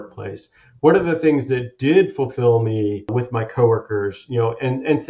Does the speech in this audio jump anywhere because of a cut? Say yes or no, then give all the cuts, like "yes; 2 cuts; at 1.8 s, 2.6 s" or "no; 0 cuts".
yes; 1 cut; at 3.1 s